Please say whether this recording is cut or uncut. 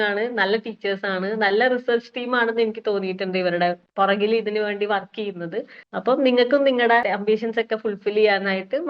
cut